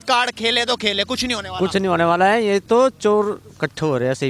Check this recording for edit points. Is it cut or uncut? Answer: uncut